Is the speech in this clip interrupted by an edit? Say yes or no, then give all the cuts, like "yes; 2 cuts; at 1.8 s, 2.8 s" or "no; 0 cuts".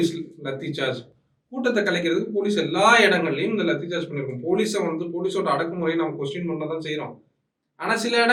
no; 0 cuts